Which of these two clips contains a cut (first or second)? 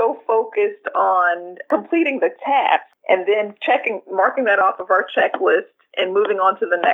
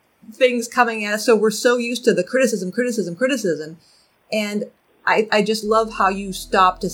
first